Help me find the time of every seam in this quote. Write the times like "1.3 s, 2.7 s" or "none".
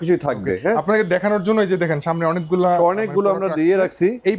none